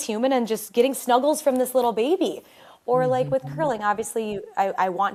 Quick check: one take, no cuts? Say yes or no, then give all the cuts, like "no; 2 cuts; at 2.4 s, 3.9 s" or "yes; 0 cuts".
yes; 0 cuts